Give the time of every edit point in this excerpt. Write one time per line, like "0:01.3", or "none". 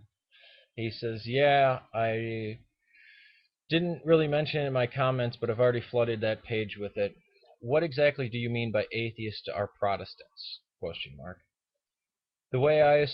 0:04.5